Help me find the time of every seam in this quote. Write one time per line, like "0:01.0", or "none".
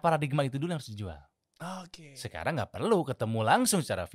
none